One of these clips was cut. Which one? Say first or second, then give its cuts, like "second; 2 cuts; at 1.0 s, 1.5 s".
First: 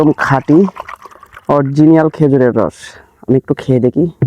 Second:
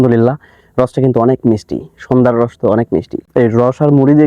second; 1 cut; at 3.3 s